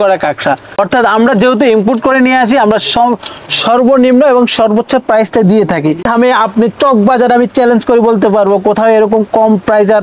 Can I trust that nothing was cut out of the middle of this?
no; 2 cuts; at 0.8 s, 6.1 s

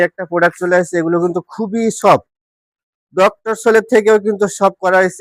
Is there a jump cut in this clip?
no; 0 cuts

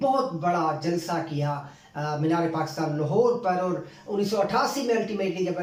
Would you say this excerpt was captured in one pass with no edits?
yes; 0 cuts

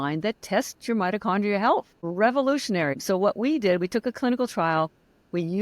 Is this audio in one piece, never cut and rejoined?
no; 2 cuts; at 2.0 s, 3.0 s

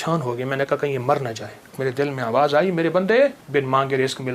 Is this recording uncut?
no; 2 cuts; at 1.8 s, 3.4 s

